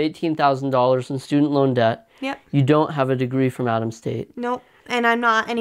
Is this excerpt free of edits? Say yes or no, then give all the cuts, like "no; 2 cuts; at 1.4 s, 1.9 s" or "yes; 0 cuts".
yes; 0 cuts